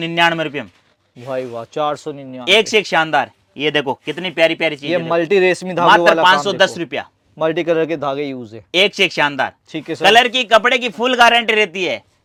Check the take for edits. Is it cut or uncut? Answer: uncut